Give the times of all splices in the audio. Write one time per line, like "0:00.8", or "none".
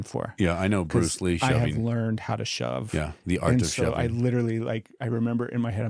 none